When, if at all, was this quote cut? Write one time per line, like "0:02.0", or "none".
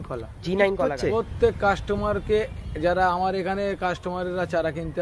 0:01.0